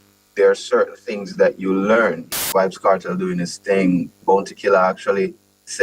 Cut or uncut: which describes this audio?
cut